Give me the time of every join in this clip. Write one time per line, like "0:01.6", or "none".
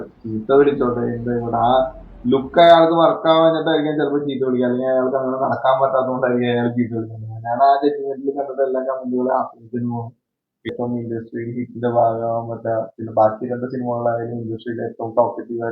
0:10.7